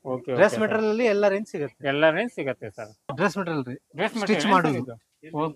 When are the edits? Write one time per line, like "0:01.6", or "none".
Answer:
0:03.1